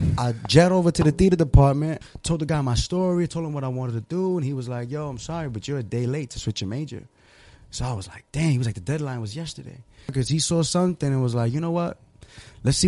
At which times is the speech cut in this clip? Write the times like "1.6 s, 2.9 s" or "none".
2.0 s, 10.1 s